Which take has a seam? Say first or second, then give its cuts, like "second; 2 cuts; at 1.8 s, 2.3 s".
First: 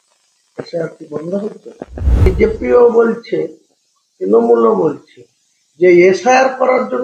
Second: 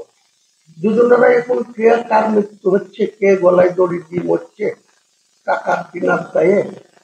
first; 1 cut; at 2.3 s